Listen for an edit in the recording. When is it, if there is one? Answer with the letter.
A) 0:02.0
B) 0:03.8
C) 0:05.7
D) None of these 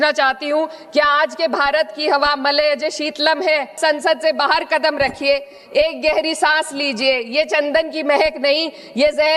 B